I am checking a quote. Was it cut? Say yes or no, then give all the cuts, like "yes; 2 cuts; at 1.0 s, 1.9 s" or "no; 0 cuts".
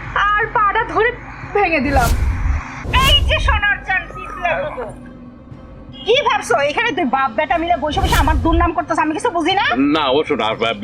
yes; 1 cut; at 2.8 s